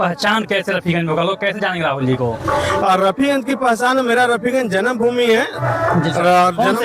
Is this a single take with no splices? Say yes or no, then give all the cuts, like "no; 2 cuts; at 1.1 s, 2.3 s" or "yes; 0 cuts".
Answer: yes; 0 cuts